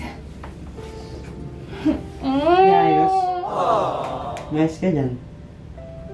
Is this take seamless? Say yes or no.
no